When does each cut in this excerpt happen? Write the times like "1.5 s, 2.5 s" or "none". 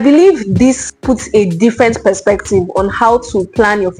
0.9 s